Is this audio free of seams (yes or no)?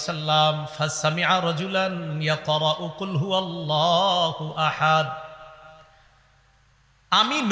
yes